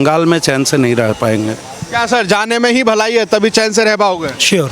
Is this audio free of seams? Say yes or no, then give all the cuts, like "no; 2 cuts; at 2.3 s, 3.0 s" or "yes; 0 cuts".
yes; 0 cuts